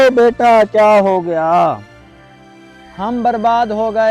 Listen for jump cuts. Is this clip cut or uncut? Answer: uncut